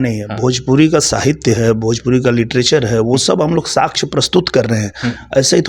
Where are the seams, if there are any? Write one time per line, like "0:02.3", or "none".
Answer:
none